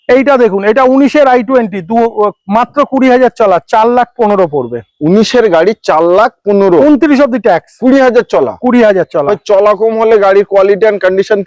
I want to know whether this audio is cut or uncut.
uncut